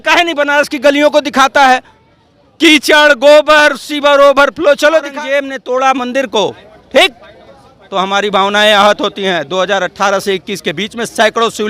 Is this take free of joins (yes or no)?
no